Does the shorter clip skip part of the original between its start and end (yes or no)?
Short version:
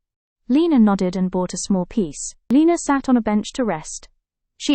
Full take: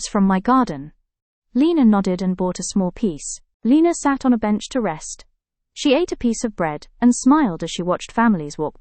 yes